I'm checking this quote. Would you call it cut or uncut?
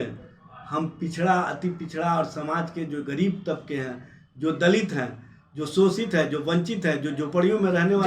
uncut